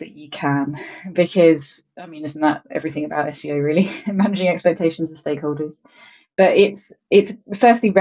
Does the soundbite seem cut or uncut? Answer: uncut